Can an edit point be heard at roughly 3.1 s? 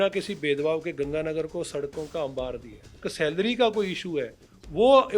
yes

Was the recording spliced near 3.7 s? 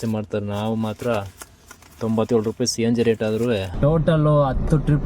yes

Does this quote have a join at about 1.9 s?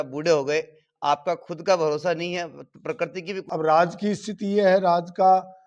no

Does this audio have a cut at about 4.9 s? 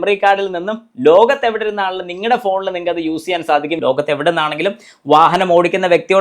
no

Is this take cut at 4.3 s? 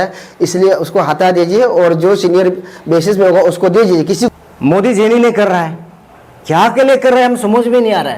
yes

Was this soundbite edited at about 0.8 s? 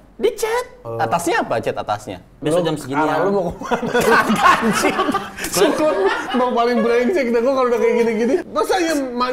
yes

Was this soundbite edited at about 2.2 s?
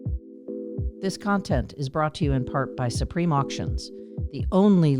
no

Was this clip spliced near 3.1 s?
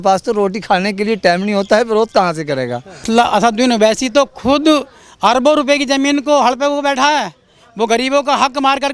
yes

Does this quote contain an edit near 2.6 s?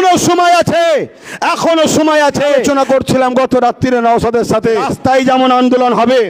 yes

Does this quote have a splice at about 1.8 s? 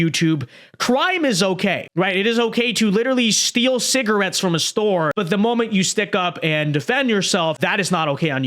yes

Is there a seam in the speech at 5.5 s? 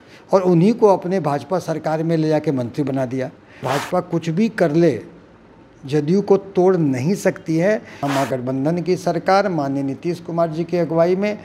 no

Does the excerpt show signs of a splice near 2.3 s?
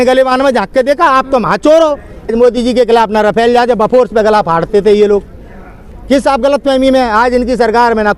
yes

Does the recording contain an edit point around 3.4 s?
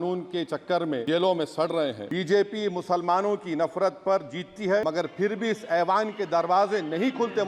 no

